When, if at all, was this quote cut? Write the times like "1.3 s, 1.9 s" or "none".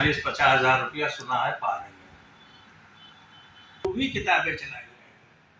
3.9 s

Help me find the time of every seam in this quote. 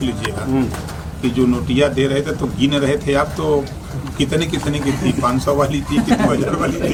none

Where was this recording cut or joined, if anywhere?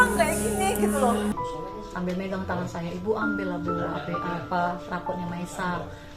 1.3 s

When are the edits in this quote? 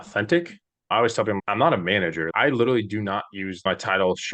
1.4 s, 2.3 s, 3.7 s

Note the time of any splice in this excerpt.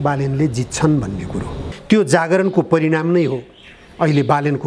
1.7 s

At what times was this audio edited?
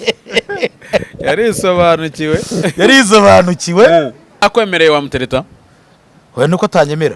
4.4 s

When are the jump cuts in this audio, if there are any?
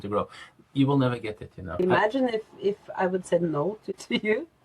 1.7 s, 3.8 s

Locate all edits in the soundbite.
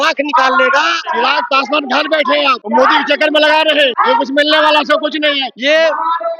1.0 s, 2.6 s, 4.0 s, 5.5 s

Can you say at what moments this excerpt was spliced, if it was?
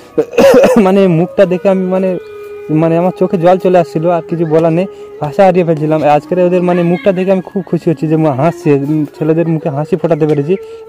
none

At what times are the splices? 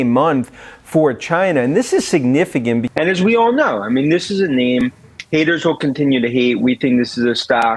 2.9 s

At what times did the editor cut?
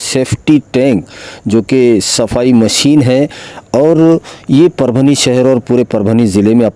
none

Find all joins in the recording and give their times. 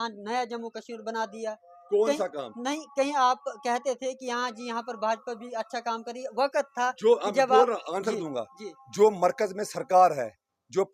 none

